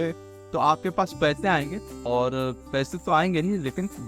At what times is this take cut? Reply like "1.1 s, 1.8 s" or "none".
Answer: 1.9 s